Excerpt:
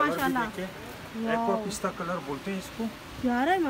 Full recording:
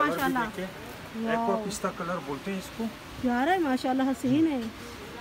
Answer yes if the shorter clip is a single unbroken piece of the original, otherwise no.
yes